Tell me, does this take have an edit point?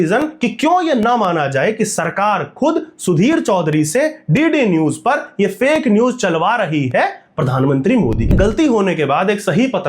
yes; 1 cut; at 8.3 s

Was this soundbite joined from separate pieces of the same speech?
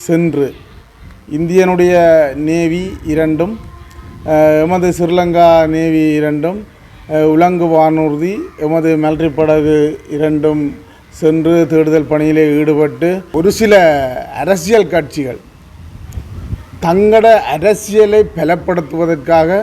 yes; 1 cut; at 13.3 s

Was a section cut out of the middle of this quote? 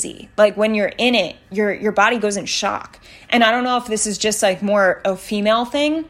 no; 0 cuts

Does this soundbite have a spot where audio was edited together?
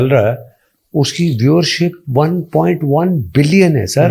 no; 0 cuts

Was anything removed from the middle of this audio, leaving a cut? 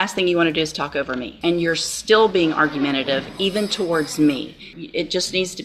yes; 2 cuts; at 1.3 s, 4.7 s

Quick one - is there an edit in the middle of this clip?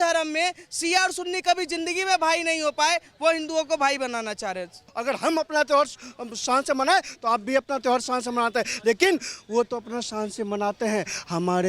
yes; 1 cut; at 4.9 s

